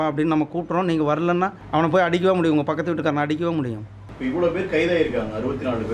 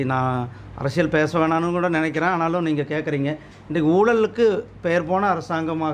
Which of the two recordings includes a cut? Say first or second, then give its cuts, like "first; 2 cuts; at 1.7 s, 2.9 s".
first; 2 cuts; at 1.6 s, 4.0 s